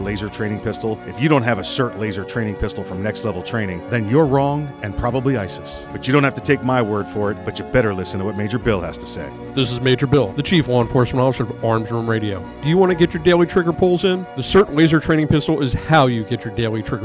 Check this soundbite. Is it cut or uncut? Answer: uncut